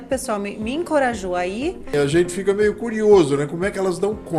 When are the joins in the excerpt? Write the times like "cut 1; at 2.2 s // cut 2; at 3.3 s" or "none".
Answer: cut 1; at 1.9 s